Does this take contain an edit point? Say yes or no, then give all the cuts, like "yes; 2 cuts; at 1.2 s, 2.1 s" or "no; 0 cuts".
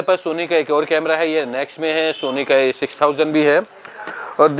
no; 0 cuts